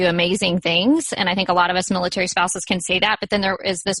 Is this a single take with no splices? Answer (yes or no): yes